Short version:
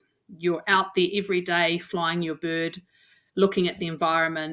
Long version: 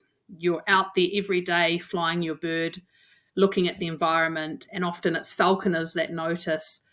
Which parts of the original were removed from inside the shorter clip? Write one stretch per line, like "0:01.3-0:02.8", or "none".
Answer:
none